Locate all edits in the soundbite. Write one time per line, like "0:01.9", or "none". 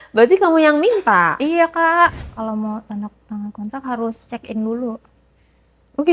0:02.2